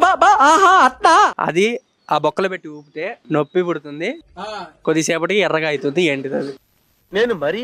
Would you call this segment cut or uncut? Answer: cut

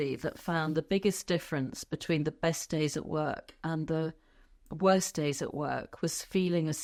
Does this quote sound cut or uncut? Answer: uncut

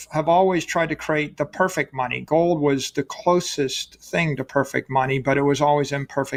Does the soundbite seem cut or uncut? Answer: uncut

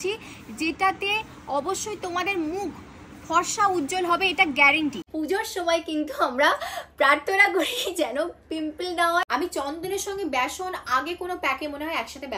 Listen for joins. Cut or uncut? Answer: cut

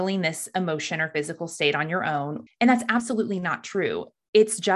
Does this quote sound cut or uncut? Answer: cut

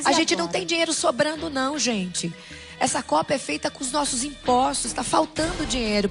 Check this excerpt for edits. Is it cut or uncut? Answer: cut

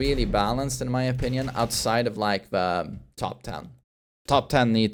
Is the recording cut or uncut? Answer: uncut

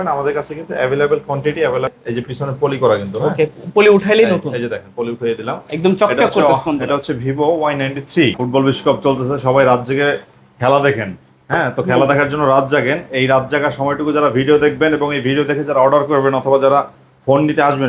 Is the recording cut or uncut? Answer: cut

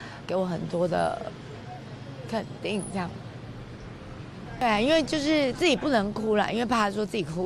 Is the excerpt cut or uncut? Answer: cut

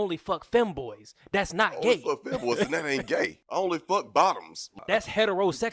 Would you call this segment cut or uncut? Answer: cut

